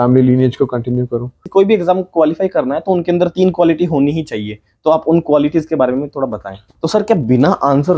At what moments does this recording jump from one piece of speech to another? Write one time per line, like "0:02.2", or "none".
0:01.4
0:06.7